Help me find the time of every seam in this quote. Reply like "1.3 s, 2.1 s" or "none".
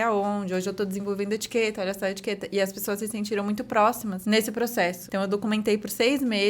4.2 s, 5.0 s